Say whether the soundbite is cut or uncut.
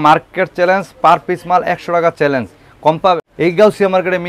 cut